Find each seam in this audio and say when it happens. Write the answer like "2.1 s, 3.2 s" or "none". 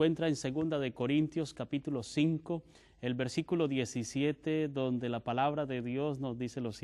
1.0 s